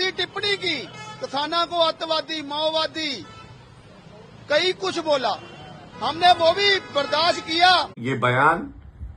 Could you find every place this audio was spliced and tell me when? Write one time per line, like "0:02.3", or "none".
0:08.0